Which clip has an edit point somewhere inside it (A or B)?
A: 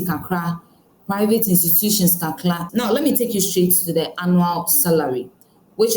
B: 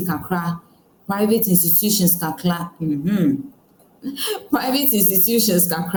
A